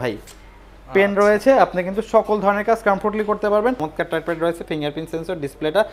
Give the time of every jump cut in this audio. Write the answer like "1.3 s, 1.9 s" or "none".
3.9 s